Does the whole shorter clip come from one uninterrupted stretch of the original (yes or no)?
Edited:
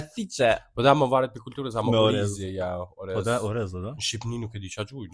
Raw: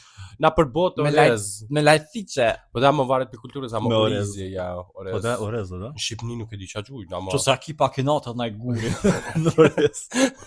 yes